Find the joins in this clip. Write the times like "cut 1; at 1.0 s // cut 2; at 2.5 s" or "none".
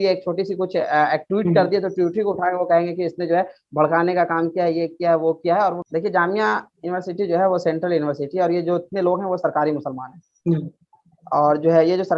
cut 1; at 5.8 s